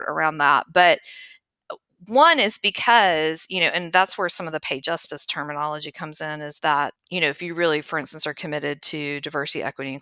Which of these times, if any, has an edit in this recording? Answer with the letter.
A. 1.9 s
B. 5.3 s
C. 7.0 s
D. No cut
C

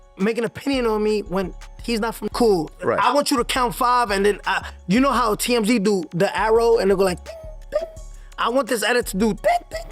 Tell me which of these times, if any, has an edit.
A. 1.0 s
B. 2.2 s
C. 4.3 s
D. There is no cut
B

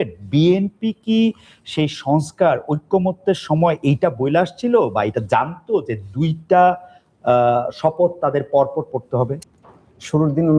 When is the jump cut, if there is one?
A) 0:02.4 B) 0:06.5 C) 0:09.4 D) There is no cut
C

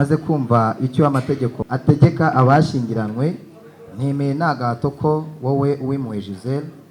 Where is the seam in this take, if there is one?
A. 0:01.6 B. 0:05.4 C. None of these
A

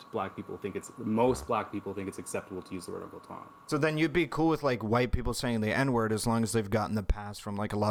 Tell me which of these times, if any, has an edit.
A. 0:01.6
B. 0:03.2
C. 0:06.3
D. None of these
D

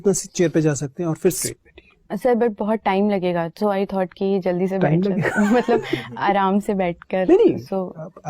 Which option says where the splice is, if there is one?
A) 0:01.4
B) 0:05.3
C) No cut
A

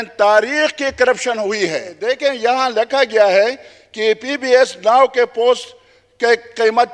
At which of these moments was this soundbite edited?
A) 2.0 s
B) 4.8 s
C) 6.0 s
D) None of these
A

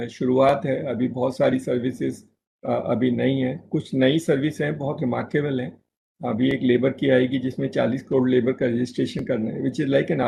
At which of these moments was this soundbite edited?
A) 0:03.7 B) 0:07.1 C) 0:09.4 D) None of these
D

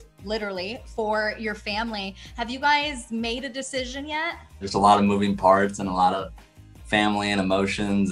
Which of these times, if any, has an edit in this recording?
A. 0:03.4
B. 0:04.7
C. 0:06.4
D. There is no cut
B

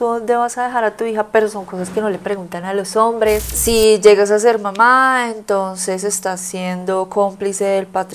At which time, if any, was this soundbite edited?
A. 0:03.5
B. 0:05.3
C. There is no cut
A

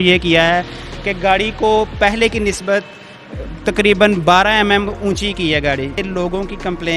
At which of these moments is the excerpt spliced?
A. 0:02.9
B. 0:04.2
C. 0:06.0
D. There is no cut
C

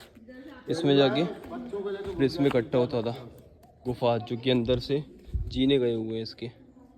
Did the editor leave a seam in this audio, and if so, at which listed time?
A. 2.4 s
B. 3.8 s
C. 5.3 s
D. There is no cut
B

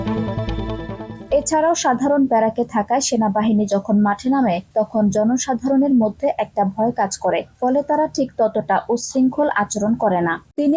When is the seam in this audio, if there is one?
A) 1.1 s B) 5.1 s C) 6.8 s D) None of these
A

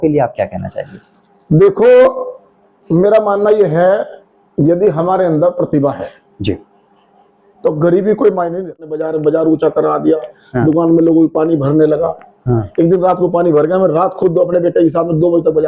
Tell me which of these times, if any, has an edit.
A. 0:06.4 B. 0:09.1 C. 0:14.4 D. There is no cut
B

